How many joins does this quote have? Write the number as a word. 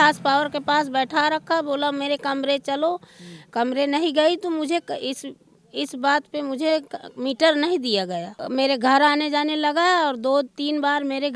one